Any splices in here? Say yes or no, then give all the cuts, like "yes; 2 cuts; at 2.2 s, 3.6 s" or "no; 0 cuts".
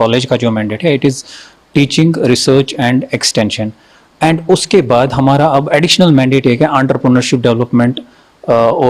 no; 0 cuts